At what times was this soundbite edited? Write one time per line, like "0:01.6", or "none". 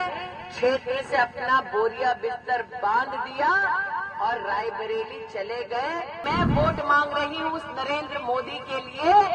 0:06.2